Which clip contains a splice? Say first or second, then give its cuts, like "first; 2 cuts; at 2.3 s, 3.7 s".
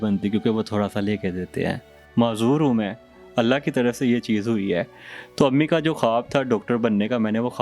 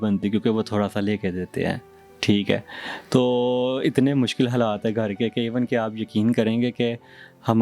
first; 1 cut; at 2.0 s